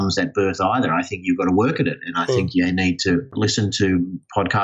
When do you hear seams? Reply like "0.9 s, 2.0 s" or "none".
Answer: 3.3 s